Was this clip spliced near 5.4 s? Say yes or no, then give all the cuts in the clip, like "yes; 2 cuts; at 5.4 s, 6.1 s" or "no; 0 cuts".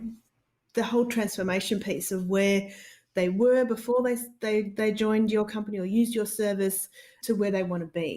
no; 1 cut; at 7.1 s